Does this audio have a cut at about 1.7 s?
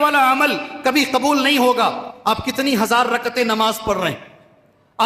no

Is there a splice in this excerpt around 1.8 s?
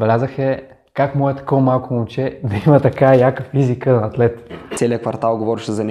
no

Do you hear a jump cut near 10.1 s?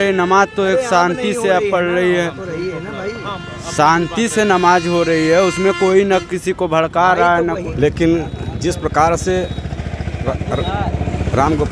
no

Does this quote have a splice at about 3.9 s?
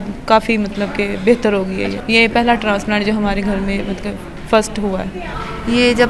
no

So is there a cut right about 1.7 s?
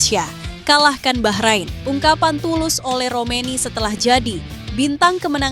yes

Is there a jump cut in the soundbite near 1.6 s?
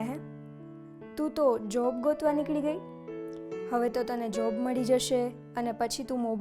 no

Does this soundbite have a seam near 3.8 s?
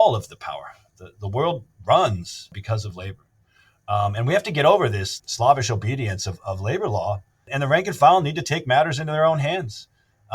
no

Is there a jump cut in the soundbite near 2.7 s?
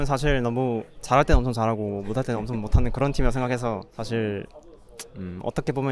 no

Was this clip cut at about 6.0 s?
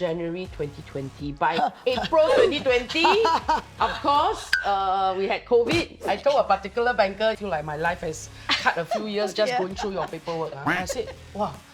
yes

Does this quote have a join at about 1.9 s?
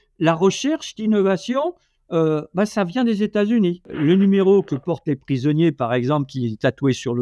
no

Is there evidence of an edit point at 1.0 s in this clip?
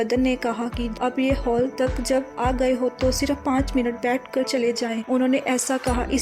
yes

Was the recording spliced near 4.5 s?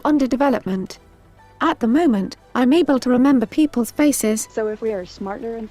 yes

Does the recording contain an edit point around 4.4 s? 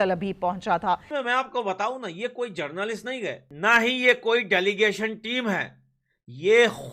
no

